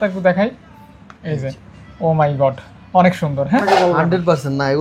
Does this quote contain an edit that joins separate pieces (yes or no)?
yes